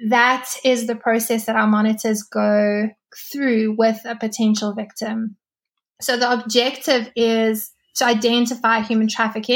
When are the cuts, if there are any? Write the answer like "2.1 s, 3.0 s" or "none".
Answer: none

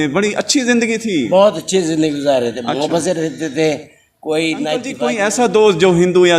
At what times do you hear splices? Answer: 4.9 s

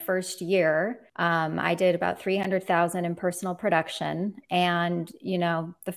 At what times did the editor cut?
1.0 s

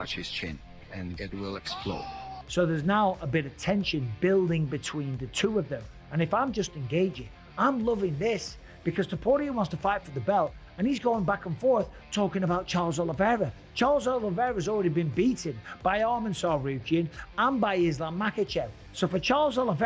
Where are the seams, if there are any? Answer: 2.4 s

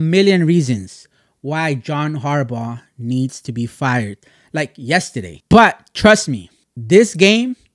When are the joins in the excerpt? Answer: 5.4 s

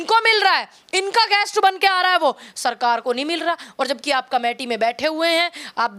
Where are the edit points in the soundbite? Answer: none

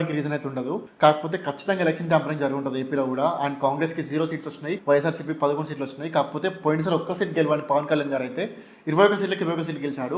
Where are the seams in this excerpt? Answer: none

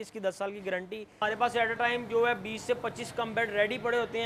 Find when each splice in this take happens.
1.2 s

